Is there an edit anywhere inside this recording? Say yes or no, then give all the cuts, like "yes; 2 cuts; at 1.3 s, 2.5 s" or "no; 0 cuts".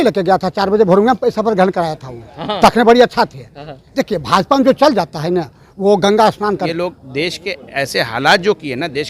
yes; 1 cut; at 6.7 s